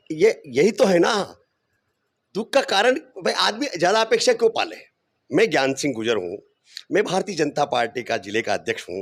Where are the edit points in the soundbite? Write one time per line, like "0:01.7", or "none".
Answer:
none